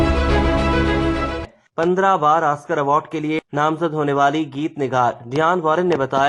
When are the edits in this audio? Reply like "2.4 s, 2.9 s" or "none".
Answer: 1.6 s